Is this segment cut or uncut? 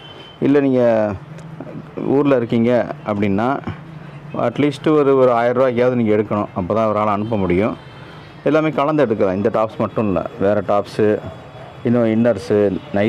uncut